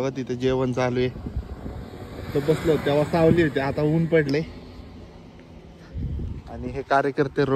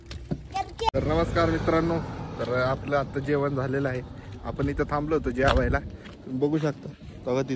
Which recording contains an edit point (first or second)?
second